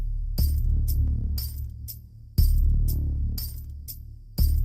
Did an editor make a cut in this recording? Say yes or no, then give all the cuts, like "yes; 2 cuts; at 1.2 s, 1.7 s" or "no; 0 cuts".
yes; 1 cut; at 3.2 s